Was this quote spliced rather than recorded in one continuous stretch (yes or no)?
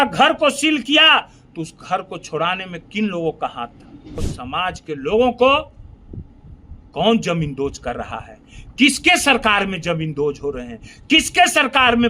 yes